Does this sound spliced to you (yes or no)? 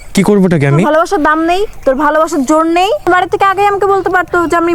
yes